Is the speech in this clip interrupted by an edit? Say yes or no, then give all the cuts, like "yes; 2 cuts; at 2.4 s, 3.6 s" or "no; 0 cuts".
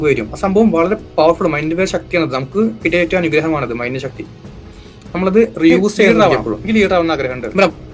yes; 1 cut; at 6.1 s